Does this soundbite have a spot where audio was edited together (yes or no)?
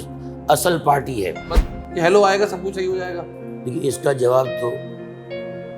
yes